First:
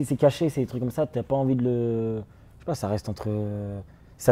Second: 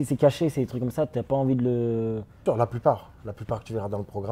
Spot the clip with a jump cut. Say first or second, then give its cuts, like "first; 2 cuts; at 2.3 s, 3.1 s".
second; 1 cut; at 2.4 s